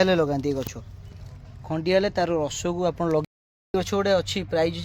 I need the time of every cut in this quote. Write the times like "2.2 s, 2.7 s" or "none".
3.2 s